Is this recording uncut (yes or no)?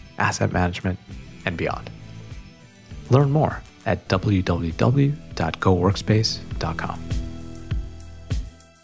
no